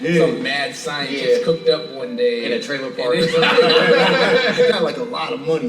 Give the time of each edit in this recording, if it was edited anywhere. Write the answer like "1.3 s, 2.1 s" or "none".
4.7 s